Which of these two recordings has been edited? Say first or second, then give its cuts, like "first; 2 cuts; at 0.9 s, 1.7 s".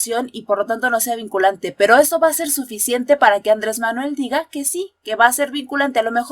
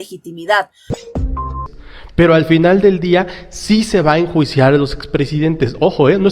second; 1 cut; at 1.4 s